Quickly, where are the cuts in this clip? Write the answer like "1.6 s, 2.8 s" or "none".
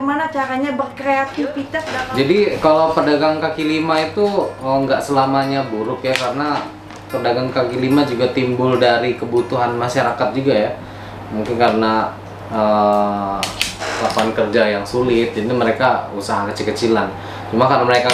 1.9 s